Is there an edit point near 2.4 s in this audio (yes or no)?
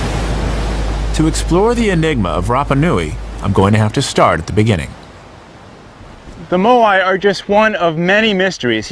yes